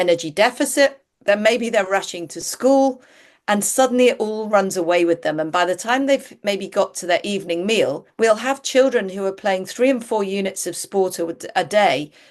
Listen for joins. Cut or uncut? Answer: cut